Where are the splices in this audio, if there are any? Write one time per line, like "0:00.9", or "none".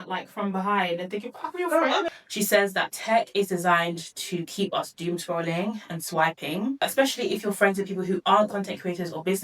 0:02.1
0:06.8